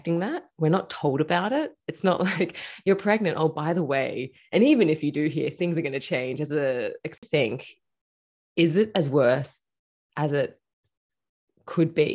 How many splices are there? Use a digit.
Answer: 1